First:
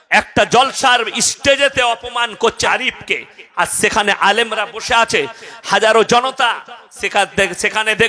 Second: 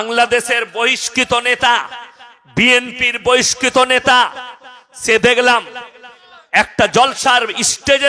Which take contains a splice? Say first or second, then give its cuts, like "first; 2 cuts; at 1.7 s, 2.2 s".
first; 1 cut; at 2.6 s